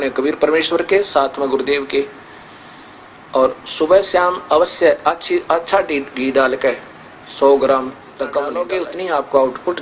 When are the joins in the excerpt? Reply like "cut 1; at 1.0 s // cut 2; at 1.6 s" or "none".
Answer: cut 1; at 8.6 s